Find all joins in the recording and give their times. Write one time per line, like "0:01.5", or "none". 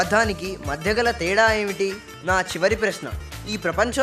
0:02.1